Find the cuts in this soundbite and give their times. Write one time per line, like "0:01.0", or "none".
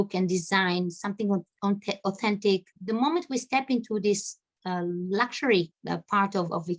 0:02.7
0:05.8